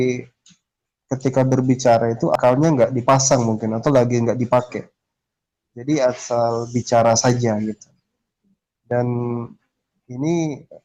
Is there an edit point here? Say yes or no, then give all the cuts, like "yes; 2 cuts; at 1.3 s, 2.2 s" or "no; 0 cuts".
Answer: no; 0 cuts